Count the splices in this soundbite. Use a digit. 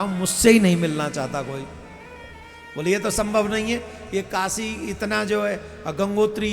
0